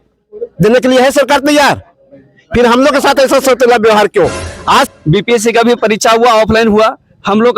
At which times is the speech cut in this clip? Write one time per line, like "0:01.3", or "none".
0:04.9